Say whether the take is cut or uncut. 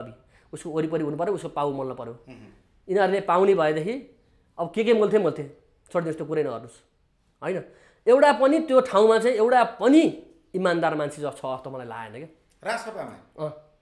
uncut